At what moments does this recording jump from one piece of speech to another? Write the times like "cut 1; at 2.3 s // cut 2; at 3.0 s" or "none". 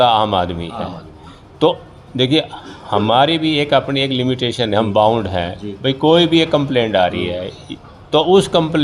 none